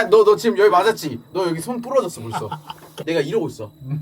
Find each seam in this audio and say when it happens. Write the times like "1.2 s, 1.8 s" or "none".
3.0 s